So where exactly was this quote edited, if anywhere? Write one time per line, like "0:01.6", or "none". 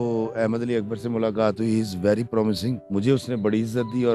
0:02.8